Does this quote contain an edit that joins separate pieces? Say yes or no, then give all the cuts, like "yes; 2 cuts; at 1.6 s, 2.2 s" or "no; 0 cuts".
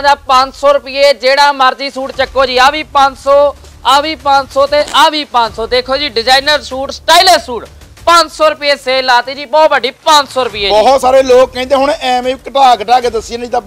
no; 0 cuts